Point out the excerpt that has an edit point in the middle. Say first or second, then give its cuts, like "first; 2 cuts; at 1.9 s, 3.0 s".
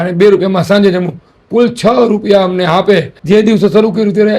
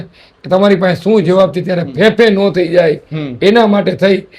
first; 1 cut; at 3.1 s